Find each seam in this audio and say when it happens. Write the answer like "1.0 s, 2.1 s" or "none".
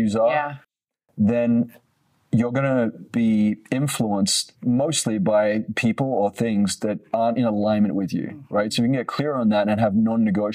3.0 s, 4.5 s